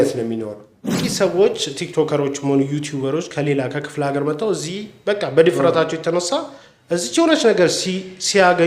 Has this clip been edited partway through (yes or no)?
yes